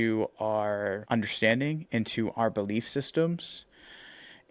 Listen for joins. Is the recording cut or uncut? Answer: cut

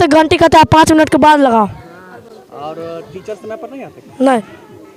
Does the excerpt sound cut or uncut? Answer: uncut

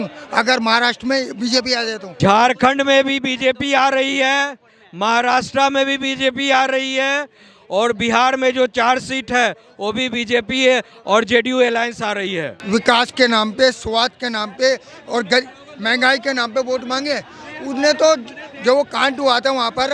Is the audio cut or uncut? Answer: cut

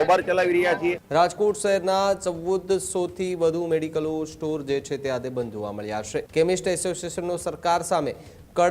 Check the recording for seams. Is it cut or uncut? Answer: cut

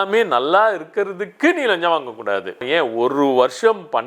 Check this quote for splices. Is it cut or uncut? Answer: cut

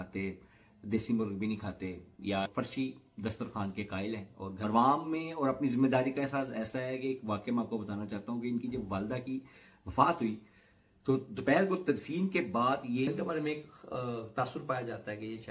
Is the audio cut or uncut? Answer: cut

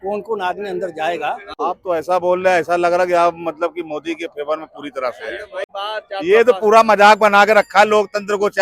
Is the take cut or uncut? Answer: cut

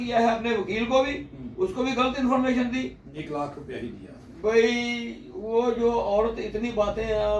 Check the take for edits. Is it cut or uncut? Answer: cut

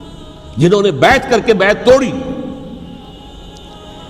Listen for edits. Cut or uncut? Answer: cut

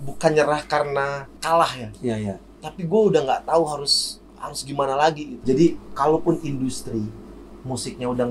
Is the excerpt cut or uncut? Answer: cut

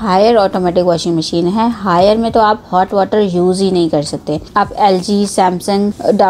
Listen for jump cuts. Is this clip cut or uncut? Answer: uncut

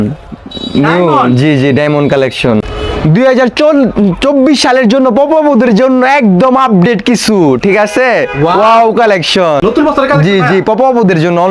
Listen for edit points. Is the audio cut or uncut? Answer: cut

